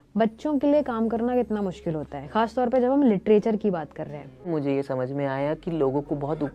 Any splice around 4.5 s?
yes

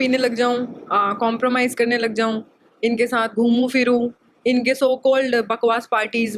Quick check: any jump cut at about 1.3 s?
no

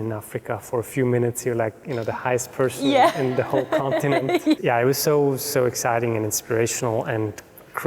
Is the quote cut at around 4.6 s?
yes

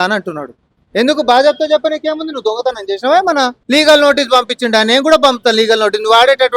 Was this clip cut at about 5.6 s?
no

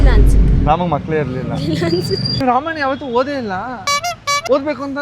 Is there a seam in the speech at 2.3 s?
yes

